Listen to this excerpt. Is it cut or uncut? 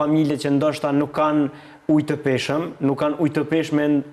uncut